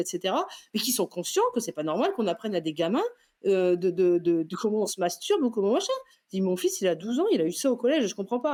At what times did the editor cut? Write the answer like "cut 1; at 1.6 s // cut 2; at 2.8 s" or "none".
none